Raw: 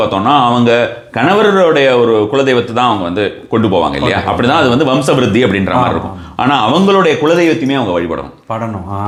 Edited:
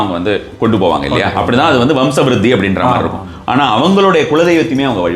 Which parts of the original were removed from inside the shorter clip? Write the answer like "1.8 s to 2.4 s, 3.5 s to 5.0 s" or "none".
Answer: none